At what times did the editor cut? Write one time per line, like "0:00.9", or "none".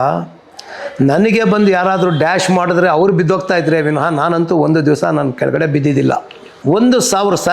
0:06.5